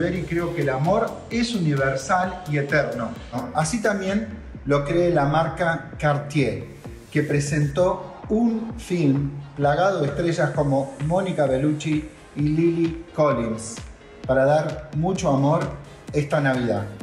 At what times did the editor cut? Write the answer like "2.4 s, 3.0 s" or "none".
none